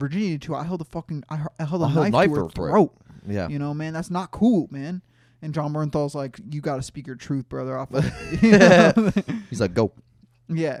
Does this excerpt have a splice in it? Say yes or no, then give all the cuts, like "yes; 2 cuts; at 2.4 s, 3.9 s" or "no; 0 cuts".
no; 0 cuts